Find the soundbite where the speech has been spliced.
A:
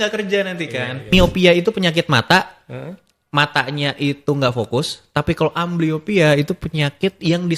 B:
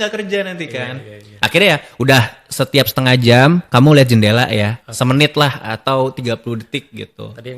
A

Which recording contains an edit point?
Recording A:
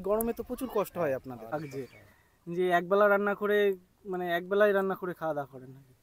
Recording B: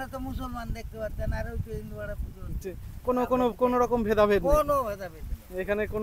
A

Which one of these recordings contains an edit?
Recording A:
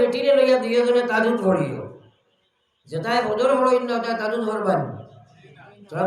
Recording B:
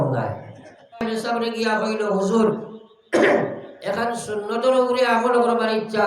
B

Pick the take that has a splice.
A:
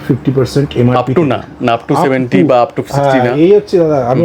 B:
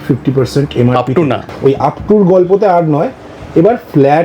B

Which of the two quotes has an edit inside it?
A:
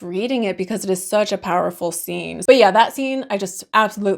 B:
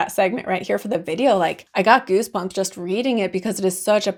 A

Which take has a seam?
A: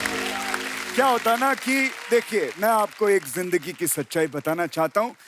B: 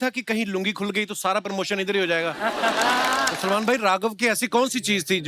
B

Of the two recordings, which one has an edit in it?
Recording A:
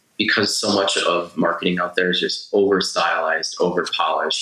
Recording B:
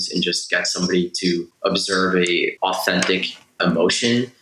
B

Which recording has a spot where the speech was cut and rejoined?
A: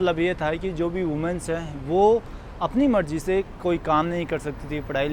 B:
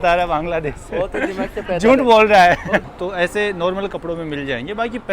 B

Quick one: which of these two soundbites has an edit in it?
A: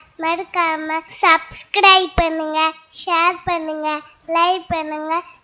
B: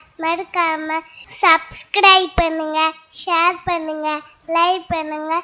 A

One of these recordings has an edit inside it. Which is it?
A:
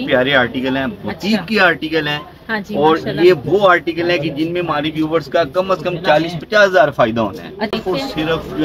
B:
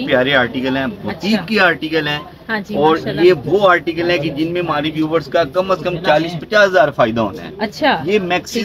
A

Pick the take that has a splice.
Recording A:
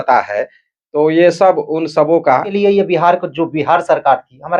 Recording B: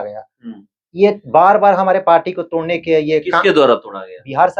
A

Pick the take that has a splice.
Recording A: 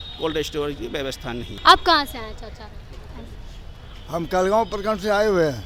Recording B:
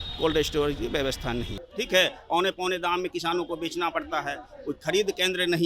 B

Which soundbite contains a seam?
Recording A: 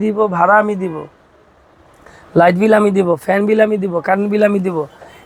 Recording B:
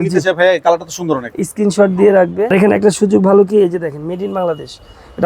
B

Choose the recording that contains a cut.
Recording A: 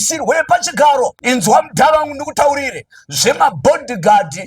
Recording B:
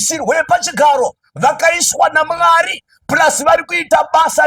A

